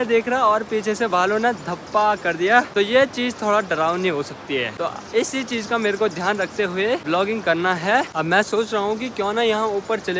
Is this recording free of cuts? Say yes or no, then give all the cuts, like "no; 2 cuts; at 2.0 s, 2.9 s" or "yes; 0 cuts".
yes; 0 cuts